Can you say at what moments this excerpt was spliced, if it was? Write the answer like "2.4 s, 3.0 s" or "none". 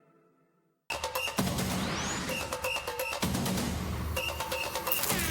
1.4 s